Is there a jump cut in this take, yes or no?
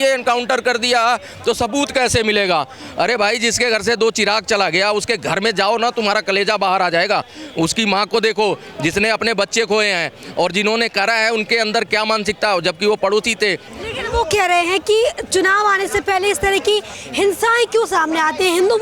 no